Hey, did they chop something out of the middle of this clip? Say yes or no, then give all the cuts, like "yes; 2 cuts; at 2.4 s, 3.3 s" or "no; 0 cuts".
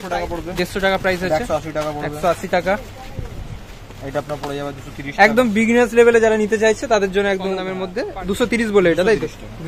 no; 0 cuts